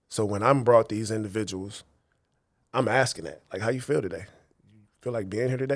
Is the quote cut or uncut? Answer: uncut